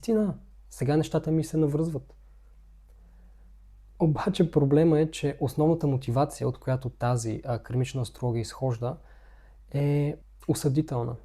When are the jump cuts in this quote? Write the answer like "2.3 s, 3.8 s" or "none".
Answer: 10.3 s